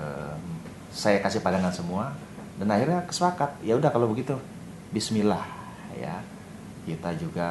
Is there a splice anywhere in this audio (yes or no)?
no